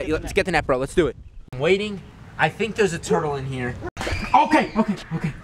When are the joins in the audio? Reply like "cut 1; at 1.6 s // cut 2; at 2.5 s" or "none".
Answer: cut 1; at 1.5 s // cut 2; at 4.2 s